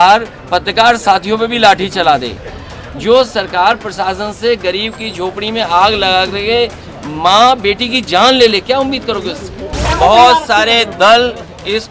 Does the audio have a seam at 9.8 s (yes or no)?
yes